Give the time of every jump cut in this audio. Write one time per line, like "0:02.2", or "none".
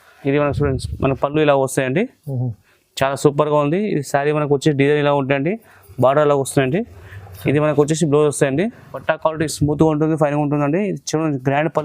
0:09.0